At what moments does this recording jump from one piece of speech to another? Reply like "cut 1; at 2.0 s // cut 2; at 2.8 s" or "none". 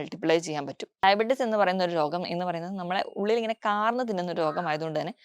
cut 1; at 1.0 s

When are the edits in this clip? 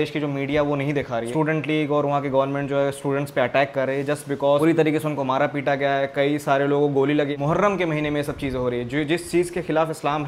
cut 1; at 1.3 s // cut 2; at 4.6 s // cut 3; at 7.3 s

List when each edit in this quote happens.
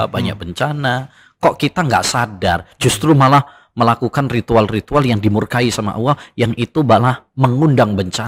none

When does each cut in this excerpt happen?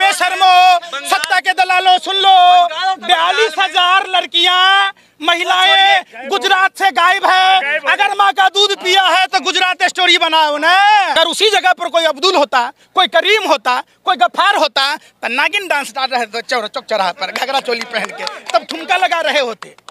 cut 1; at 11.1 s

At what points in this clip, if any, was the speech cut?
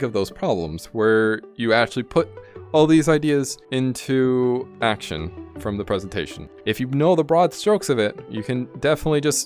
cut 1; at 0.9 s // cut 2; at 3.6 s // cut 3; at 4.7 s // cut 4; at 6.5 s

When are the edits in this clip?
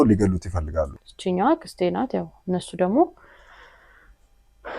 cut 1; at 1.0 s

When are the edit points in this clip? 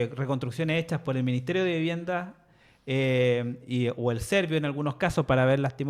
none

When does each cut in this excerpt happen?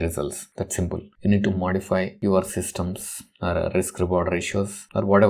cut 1; at 1.1 s

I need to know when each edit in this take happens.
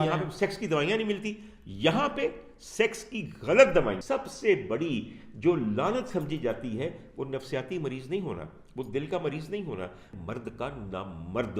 cut 1; at 4.0 s // cut 2; at 10.1 s

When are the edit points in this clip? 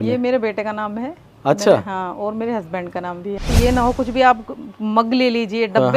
cut 1; at 3.5 s

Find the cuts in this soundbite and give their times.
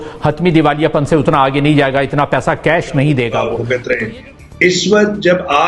cut 1; at 3.6 s

